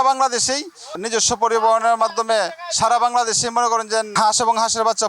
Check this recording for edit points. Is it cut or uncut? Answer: cut